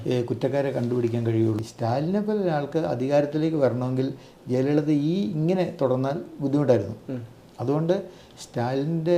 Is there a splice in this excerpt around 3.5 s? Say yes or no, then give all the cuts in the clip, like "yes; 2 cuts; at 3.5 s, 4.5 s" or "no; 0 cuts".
no; 1 cut; at 1.6 s